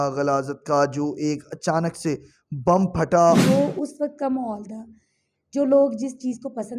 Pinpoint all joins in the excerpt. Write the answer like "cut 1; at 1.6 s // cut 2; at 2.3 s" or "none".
cut 1; at 3.4 s

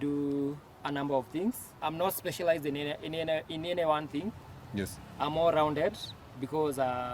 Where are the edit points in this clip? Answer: cut 1; at 1.7 s

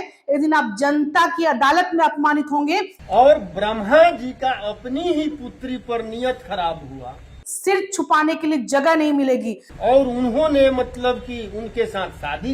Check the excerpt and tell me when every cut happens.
cut 1; at 2.9 s // cut 2; at 7.4 s // cut 3; at 9.6 s

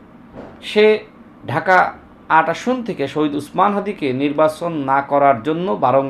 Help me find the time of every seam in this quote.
none

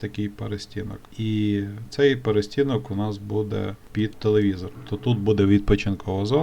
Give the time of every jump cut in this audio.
cut 1; at 1.0 s

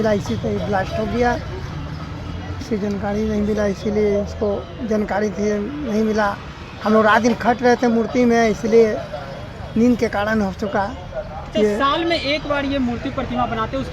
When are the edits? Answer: none

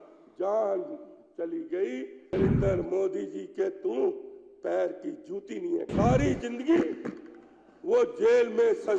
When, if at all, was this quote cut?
cut 1; at 2.3 s // cut 2; at 5.9 s

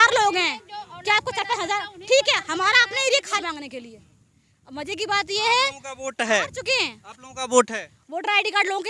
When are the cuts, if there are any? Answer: cut 1; at 3.4 s

